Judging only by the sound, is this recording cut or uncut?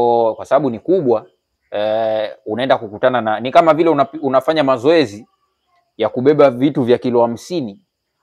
uncut